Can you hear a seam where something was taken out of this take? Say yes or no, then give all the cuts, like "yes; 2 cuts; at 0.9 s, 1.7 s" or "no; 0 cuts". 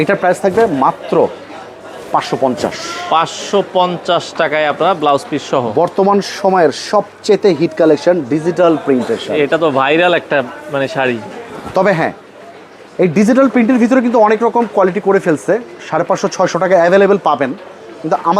no; 0 cuts